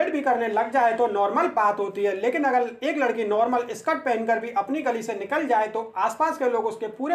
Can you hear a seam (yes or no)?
no